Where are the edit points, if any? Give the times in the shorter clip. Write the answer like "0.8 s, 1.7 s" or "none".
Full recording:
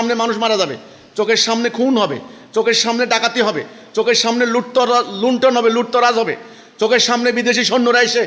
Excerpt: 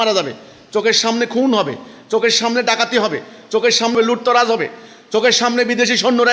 3.9 s